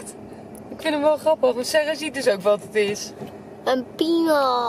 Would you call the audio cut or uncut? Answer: uncut